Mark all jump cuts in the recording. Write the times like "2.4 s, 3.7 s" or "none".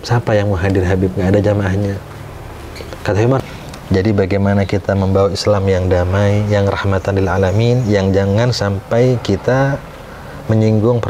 3.4 s